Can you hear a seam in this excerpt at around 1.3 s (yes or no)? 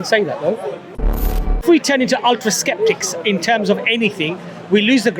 yes